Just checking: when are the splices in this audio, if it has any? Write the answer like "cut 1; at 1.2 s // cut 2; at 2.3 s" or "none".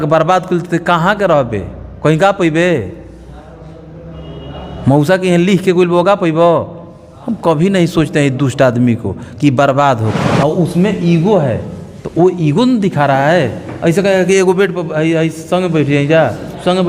cut 1; at 10.2 s